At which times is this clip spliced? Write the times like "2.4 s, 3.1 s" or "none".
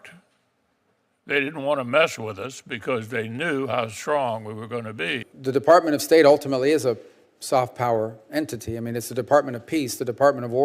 5.3 s